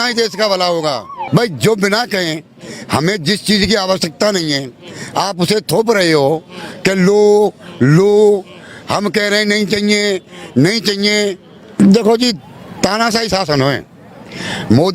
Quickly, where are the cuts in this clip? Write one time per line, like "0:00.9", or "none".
0:01.1
0:11.6

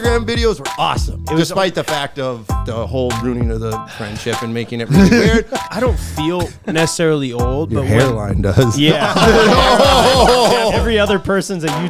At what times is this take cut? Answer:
0:01.1
0:02.6
0:05.6
0:10.8

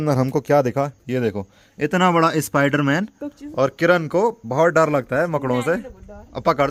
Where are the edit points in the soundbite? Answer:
none

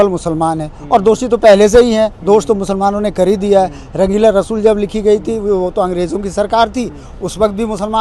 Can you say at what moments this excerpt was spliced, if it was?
none

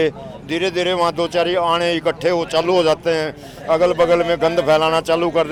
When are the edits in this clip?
none

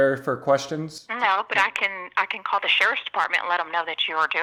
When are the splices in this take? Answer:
none

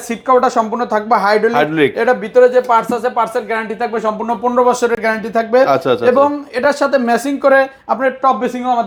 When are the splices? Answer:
none

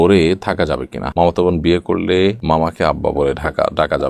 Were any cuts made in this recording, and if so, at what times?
0:01.1

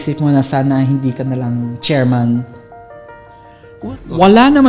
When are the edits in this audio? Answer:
0:03.7

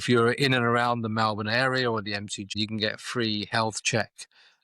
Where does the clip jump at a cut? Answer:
0:02.5

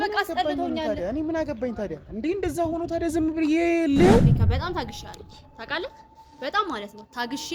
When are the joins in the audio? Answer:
0:04.4

